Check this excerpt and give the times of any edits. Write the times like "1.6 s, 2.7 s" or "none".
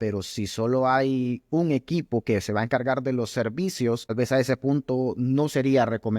4.1 s